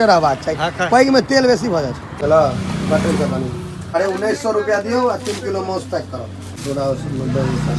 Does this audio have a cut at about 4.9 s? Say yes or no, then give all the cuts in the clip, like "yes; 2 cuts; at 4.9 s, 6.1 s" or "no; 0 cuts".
no; 3 cuts; at 2.0 s, 3.7 s, 6.6 s